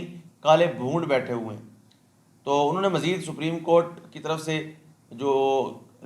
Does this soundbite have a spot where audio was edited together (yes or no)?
no